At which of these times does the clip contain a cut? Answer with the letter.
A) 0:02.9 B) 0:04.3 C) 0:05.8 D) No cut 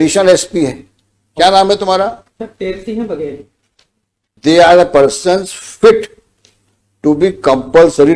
B